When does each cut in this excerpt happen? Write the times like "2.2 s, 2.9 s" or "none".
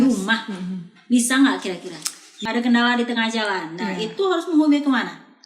2.3 s